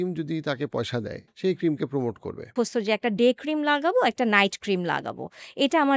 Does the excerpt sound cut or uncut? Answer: cut